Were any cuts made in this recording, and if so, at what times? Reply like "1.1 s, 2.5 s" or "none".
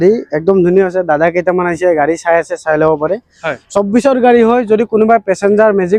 none